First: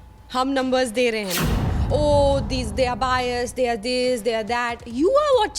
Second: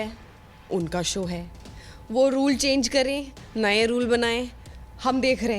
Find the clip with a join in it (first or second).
first